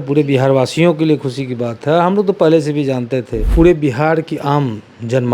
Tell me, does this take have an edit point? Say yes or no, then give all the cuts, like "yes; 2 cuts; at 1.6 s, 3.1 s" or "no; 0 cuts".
yes; 1 cut; at 3.4 s